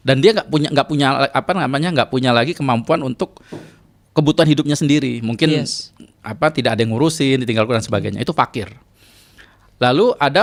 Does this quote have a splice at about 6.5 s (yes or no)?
no